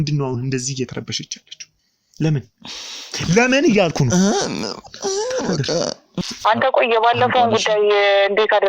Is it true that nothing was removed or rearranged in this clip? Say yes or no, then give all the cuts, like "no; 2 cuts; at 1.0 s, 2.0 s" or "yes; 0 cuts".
no; 1 cut; at 6.3 s